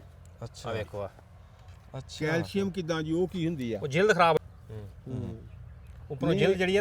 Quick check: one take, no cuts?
no; 1 cut; at 4.4 s

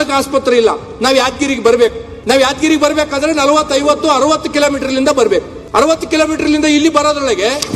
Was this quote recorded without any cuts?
no; 2 cuts; at 2.1 s, 5.6 s

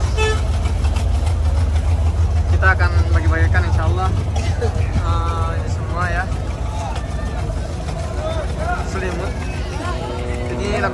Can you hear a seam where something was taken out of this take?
no; 0 cuts

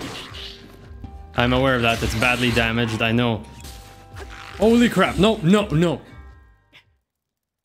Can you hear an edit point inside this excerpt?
no; 0 cuts

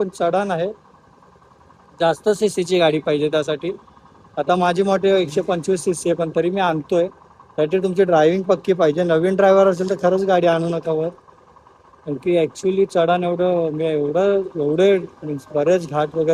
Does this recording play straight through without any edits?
yes; 0 cuts

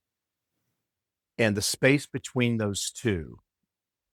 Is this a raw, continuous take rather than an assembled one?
yes; 0 cuts

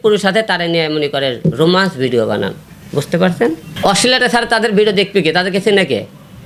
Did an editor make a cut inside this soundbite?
yes; 1 cut; at 3.7 s

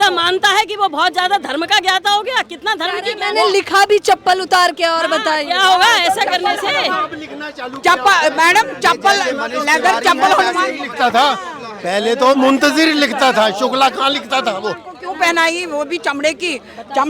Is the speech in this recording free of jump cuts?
yes; 0 cuts

